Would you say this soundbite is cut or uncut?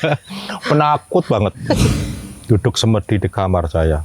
cut